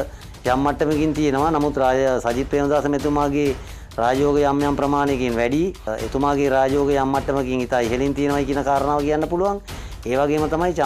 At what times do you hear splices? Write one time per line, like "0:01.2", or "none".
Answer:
0:05.9